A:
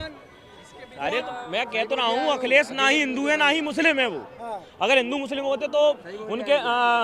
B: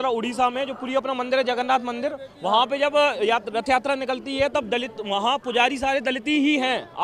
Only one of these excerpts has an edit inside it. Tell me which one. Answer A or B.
A